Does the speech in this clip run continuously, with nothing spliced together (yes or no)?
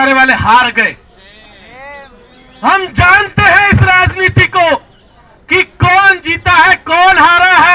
yes